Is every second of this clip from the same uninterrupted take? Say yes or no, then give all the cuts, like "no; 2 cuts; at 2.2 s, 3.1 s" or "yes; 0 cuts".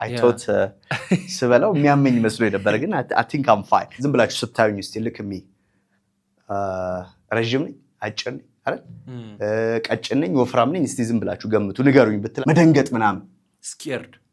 no; 2 cuts; at 3.9 s, 12.3 s